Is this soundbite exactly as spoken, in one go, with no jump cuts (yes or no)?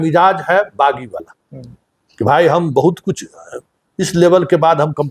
yes